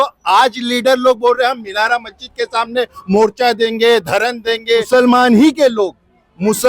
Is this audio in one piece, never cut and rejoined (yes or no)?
no